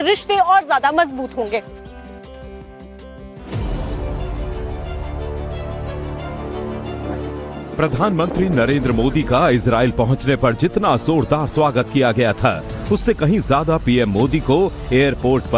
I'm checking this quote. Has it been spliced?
yes; 1 cut; at 10.2 s

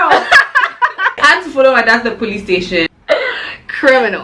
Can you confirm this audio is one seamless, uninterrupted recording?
no; 2 cuts; at 1.1 s, 2.9 s

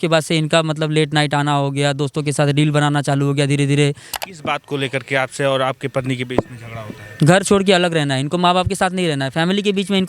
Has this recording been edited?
yes; 1 cut; at 4.1 s

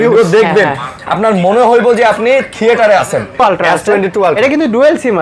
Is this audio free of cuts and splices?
no; 1 cut; at 3.4 s

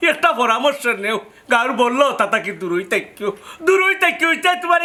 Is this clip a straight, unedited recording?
yes; 0 cuts

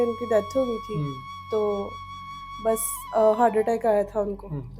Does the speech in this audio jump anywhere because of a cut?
no; 0 cuts

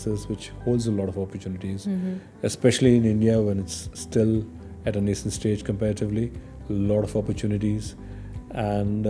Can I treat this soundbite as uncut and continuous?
yes; 0 cuts

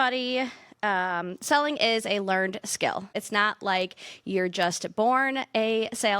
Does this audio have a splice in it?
yes; 1 cut; at 3.2 s

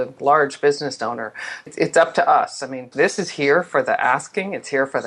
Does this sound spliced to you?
yes; 2 cuts; at 1.7 s, 2.9 s

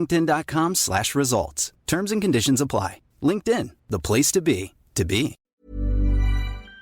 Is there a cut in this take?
yes; 1 cut; at 5.5 s

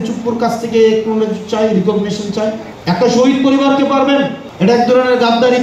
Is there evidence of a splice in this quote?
yes; 2 cuts; at 2.7 s, 4.4 s

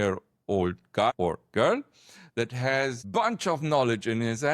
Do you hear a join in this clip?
yes; 2 cuts; at 1.1 s, 3.0 s

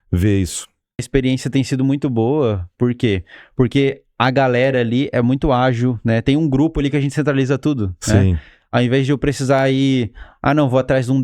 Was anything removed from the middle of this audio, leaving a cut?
yes; 1 cut; at 1.1 s

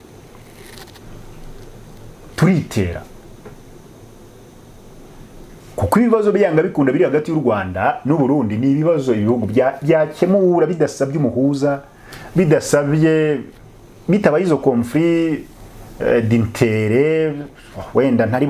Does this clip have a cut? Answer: no; 0 cuts

